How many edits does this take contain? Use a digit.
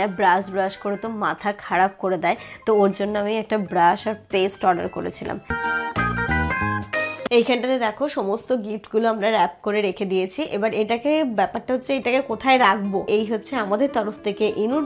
2